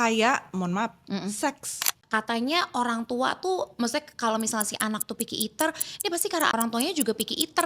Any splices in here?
yes; 2 cuts; at 2.0 s, 6.5 s

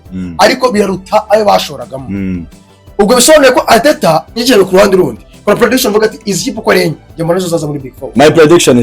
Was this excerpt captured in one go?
no; 1 cut; at 4.4 s

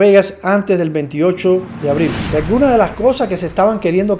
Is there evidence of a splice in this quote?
yes; 1 cut; at 2.2 s

